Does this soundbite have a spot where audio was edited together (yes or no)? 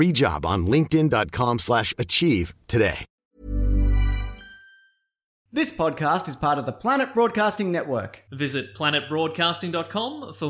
yes